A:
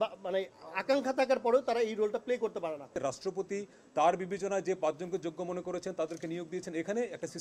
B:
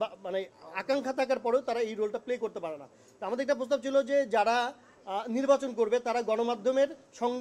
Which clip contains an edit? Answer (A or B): A